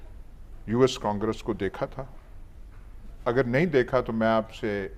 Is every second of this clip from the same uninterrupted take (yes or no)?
yes